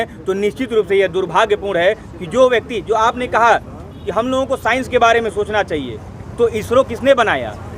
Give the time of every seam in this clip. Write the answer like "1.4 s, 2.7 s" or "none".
none